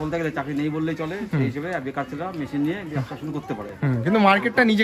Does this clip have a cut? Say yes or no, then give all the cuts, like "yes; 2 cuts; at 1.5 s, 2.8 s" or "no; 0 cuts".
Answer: no; 0 cuts